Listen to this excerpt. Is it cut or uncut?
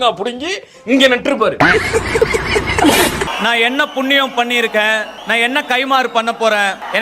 cut